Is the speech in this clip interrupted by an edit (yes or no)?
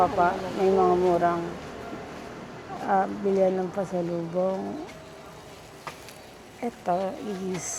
no